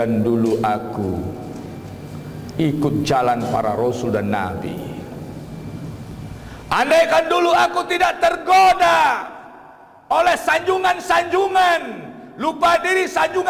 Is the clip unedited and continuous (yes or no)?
yes